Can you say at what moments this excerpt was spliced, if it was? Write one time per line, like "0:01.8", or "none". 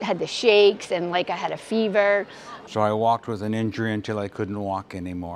0:02.6